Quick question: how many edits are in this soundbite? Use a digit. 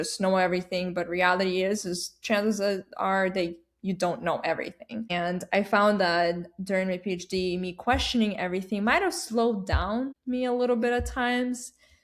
2